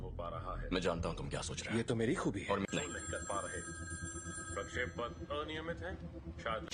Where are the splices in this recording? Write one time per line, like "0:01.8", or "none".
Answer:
none